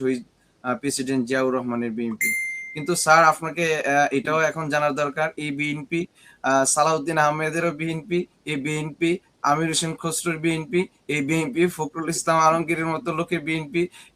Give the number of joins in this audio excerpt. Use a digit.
0